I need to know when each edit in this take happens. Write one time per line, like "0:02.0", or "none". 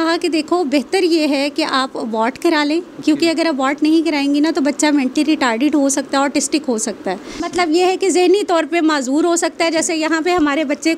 0:07.3